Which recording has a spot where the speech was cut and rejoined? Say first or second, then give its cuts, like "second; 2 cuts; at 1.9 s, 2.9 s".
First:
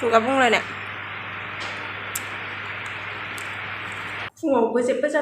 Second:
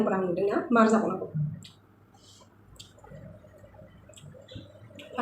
first; 1 cut; at 4.3 s